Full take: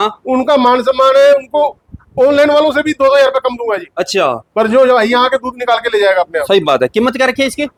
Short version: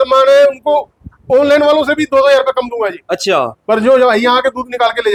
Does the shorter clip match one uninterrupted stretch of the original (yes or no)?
yes